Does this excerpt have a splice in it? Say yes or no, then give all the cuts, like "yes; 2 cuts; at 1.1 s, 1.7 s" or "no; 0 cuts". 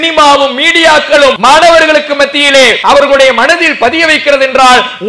yes; 2 cuts; at 1.4 s, 2.8 s